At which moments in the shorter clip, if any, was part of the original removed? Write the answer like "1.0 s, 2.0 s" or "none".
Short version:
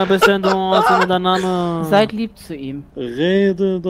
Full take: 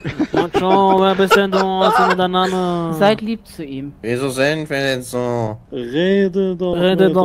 2.9 s